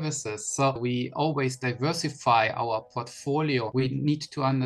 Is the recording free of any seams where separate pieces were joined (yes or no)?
no